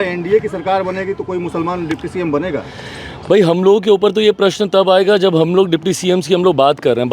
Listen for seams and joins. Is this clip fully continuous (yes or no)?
yes